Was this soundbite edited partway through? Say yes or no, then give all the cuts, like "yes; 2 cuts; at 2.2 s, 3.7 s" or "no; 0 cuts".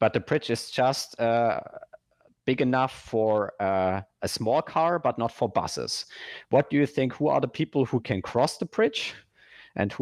no; 0 cuts